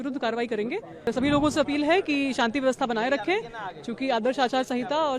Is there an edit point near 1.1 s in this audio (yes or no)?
yes